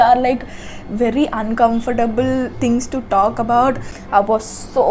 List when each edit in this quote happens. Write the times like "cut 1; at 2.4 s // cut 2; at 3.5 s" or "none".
cut 1; at 3.9 s